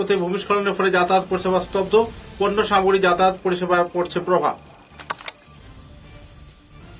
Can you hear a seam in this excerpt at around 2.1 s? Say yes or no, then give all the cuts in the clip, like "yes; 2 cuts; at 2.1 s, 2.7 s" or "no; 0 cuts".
no; 0 cuts